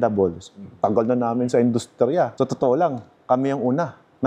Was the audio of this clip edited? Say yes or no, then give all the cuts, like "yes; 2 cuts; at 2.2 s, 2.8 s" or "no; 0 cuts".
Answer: no; 0 cuts